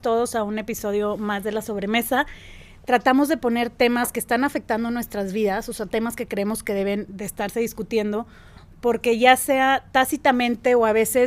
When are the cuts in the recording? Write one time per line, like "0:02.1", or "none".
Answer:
none